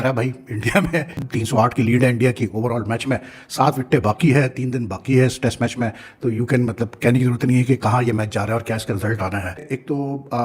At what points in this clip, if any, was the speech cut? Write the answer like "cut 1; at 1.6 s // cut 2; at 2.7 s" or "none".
none